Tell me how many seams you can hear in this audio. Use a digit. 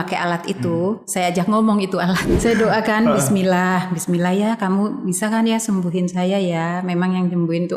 1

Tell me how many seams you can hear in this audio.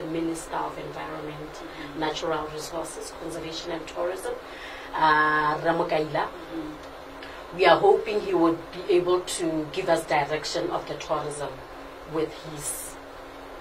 0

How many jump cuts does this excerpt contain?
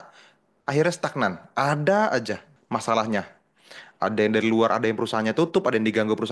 1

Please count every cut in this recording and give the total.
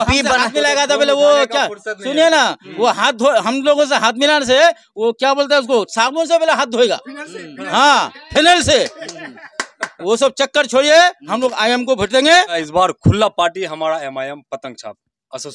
1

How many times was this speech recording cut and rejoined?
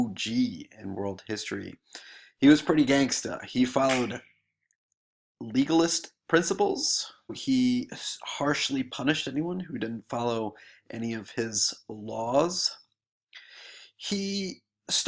0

